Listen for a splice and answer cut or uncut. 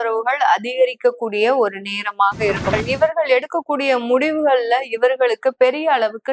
cut